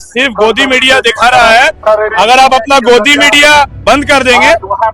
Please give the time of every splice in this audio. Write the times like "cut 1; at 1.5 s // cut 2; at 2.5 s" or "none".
none